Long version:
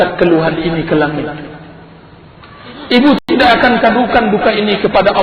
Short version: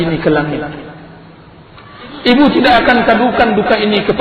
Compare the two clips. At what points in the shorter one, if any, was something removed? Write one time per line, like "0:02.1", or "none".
0:02.5